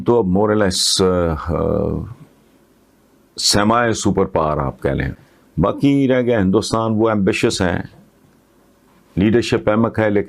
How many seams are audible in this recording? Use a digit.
1